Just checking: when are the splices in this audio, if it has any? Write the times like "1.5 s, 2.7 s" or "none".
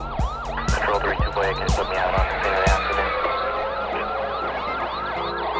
2.3 s